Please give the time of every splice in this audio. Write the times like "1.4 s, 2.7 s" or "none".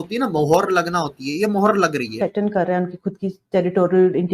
2.1 s